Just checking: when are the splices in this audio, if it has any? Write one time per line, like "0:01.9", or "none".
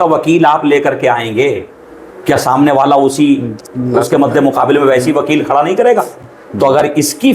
none